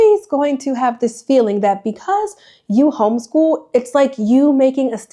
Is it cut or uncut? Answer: uncut